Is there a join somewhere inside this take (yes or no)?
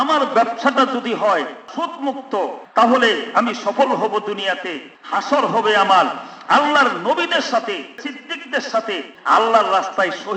yes